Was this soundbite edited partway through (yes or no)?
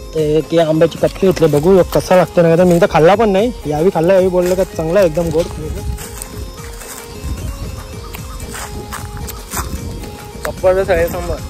no